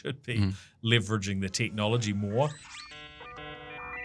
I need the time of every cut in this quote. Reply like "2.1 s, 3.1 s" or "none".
2.7 s